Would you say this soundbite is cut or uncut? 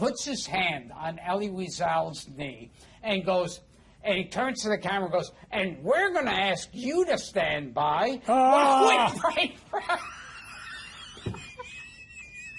uncut